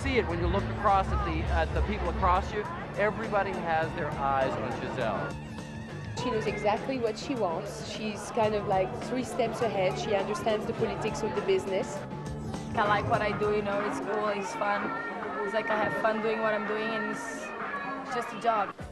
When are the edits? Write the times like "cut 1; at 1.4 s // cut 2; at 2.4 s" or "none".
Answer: cut 1; at 15.1 s